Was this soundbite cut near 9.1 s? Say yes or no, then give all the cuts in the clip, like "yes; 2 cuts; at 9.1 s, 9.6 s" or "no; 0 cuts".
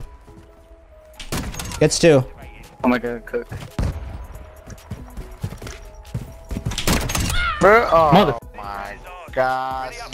no; 1 cut; at 3.9 s